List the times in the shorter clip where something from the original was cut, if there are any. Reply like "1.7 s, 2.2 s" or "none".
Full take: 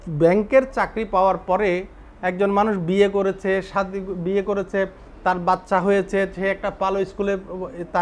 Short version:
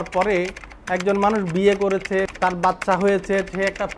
2.3 s

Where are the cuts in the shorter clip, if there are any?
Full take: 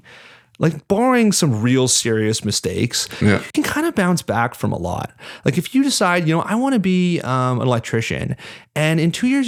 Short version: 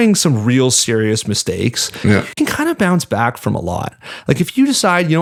none

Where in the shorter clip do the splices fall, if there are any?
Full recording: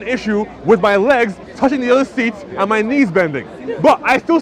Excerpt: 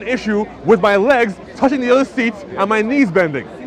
none

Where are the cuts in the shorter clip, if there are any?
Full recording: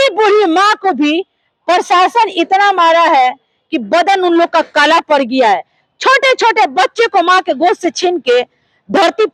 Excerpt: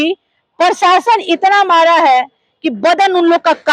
none

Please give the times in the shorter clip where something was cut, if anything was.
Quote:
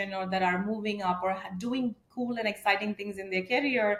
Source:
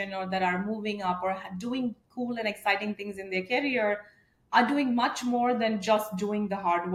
none

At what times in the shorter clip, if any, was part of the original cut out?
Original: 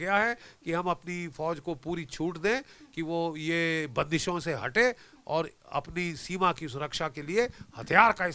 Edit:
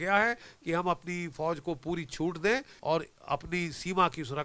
2.7 s

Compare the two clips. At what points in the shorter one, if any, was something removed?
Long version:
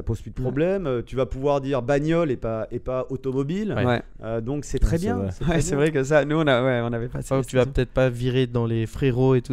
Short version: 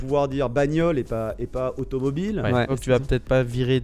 2.7 s

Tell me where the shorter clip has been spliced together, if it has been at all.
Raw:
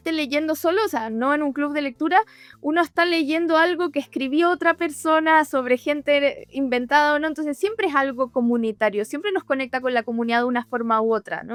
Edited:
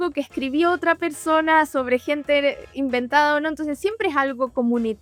none

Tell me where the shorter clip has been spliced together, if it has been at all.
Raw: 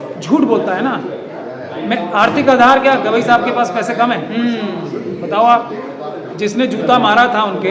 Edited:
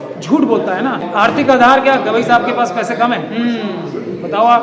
1.0 s

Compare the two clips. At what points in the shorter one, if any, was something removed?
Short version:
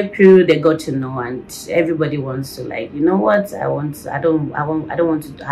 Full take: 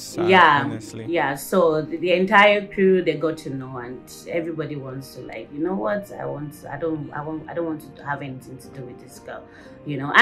none

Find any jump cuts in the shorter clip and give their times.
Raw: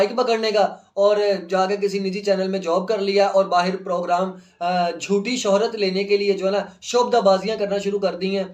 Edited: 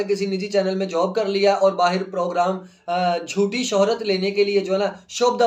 none

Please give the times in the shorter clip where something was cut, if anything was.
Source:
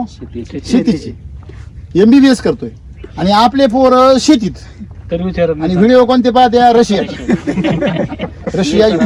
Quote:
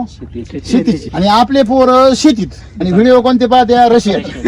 1.1 s, 2.8 s

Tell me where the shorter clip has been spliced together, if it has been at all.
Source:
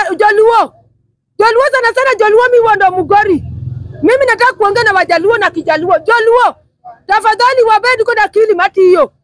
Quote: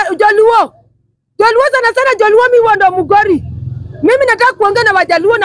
none

